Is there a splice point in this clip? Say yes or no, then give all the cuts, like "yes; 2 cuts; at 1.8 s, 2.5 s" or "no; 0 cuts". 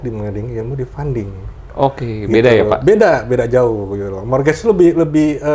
no; 0 cuts